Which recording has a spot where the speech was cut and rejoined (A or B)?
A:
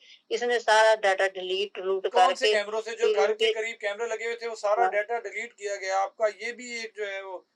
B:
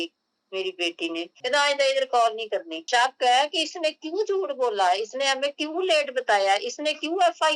B